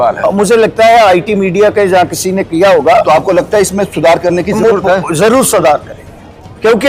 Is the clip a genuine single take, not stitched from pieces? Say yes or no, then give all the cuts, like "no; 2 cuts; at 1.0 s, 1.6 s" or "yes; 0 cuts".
yes; 0 cuts